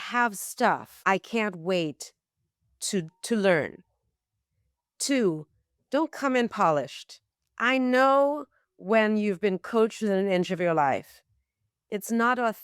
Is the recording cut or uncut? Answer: cut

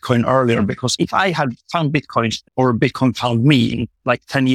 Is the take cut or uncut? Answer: cut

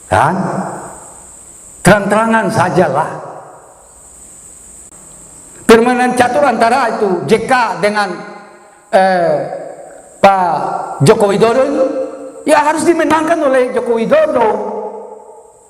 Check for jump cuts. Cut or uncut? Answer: cut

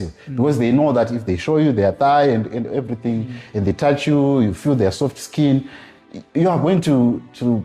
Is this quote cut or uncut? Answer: uncut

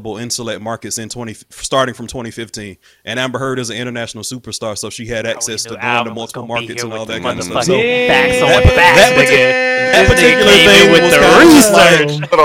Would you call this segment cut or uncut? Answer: uncut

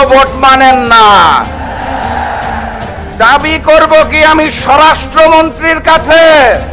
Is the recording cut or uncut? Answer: uncut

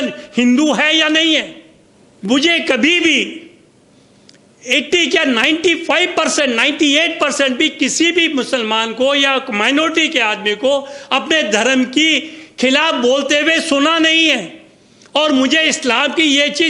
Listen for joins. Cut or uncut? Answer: uncut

